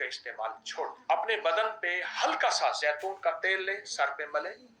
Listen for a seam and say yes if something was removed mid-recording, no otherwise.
yes